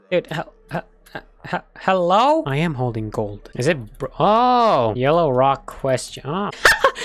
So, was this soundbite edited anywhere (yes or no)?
no